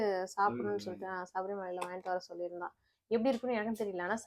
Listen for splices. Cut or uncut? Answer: uncut